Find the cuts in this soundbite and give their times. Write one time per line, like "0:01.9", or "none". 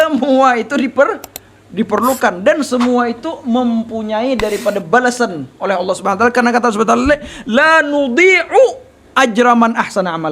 none